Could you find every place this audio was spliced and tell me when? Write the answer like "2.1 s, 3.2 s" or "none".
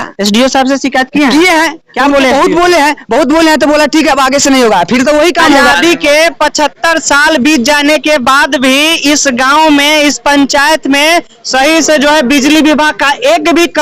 5.7 s